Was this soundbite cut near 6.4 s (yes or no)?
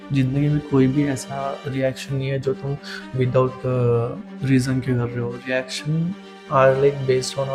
no